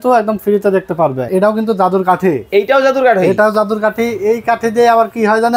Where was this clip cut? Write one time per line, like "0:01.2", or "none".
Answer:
0:01.3